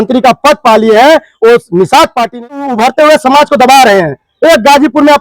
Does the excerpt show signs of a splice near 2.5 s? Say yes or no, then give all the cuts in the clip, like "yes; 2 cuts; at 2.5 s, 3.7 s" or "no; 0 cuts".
yes; 1 cut; at 2.5 s